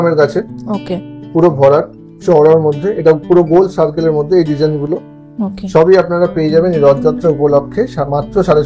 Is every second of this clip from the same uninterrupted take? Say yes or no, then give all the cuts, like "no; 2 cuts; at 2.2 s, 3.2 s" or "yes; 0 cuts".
yes; 0 cuts